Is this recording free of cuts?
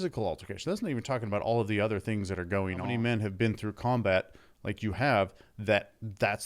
no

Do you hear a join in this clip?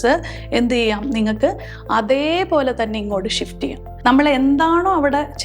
yes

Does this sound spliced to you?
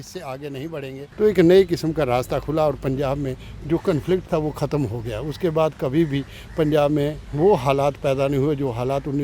yes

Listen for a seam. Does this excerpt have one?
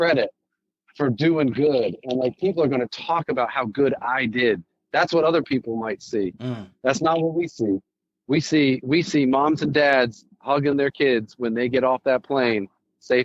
no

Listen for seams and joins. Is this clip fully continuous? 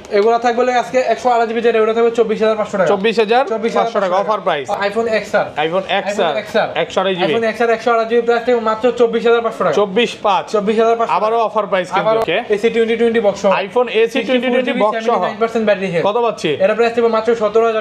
no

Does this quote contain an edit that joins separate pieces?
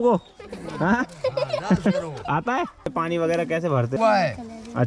yes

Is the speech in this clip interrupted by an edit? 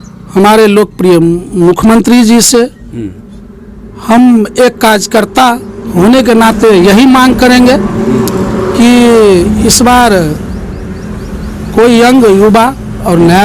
no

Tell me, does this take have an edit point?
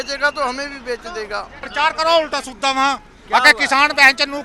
yes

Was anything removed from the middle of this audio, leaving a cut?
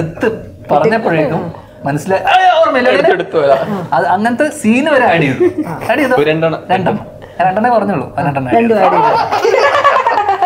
no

